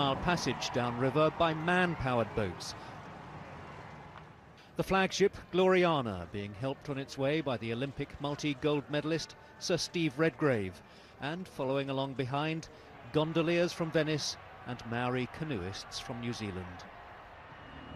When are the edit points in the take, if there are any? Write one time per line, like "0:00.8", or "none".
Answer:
none

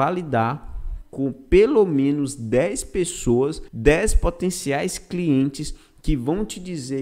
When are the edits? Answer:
0:03.7

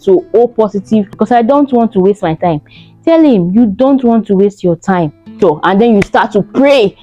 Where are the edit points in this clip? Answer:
0:01.1
0:05.4

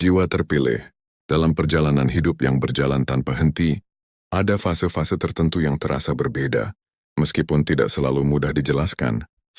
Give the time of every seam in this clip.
0:00.9

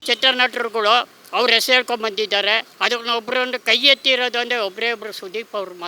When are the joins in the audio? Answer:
0:02.7

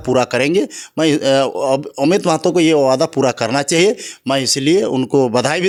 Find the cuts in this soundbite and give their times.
none

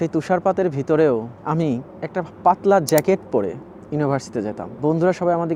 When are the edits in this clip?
none

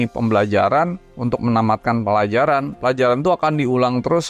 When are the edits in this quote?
0:01.1

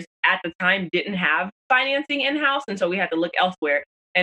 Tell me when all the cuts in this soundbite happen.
none

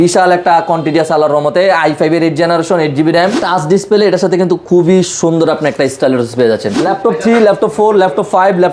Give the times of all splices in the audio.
0:03.4
0:06.7

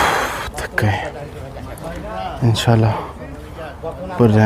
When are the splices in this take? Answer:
none

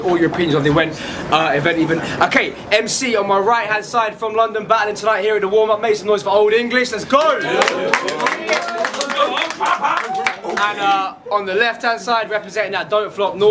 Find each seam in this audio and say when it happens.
0:08.5

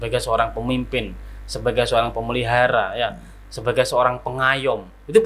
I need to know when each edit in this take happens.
none

